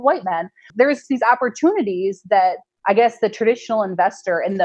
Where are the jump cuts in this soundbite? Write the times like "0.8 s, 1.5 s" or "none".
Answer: 0.7 s, 2.7 s